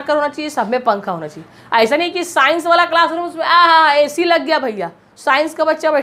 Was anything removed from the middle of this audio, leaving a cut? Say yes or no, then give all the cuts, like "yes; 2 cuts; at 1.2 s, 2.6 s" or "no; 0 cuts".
no; 0 cuts